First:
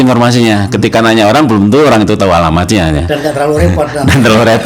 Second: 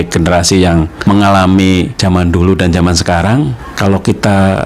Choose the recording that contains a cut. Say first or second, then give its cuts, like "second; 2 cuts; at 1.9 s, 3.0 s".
second; 3 cuts; at 0.9 s, 1.9 s, 3.6 s